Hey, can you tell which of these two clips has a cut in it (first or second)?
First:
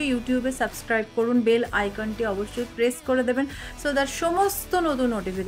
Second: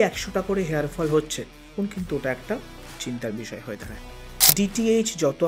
second